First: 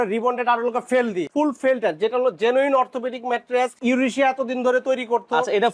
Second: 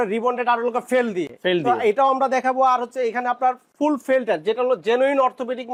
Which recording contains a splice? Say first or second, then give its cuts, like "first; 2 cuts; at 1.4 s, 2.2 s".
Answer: first; 2 cuts; at 1.3 s, 3.8 s